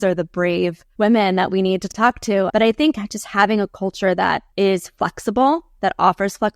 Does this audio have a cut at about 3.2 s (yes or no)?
no